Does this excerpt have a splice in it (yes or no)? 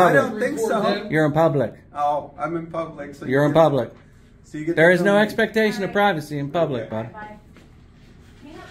no